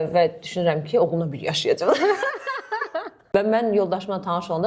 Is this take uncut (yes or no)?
no